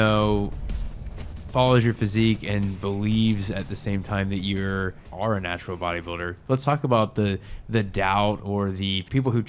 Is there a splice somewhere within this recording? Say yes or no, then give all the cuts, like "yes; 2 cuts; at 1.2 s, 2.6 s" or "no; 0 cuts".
no; 0 cuts